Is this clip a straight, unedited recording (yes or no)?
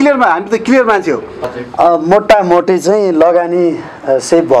no